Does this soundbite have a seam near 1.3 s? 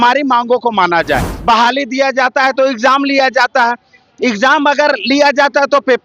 yes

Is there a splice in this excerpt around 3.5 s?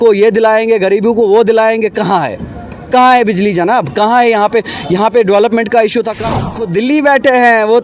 no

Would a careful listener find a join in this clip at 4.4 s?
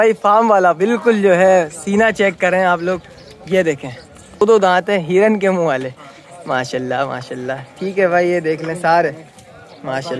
yes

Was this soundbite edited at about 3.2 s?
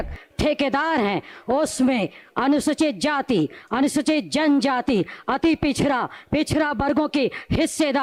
no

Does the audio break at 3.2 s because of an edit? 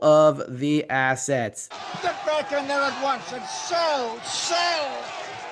no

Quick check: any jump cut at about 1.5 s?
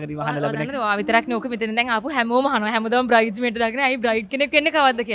no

